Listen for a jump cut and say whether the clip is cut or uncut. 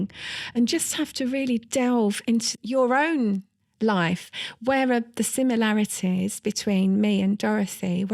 cut